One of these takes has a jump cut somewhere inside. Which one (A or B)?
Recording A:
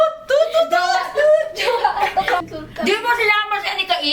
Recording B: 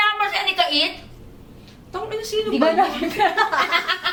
A